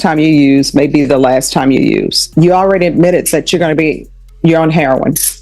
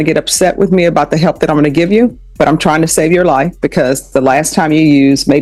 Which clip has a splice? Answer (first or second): first